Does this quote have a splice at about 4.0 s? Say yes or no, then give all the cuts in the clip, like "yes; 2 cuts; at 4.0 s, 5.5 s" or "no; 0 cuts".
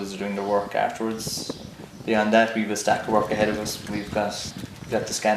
no; 1 cut; at 1.3 s